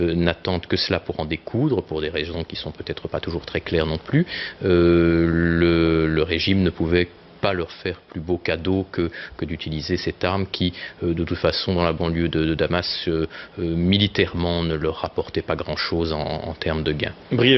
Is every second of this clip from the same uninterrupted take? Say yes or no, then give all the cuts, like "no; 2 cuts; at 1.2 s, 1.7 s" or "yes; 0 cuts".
yes; 0 cuts